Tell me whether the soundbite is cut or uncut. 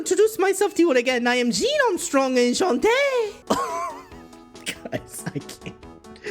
cut